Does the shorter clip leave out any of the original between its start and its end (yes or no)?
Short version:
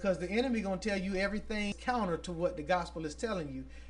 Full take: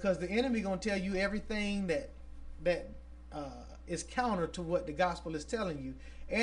yes